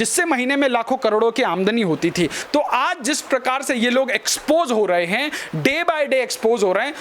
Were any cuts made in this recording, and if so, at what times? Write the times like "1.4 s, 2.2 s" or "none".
2.4 s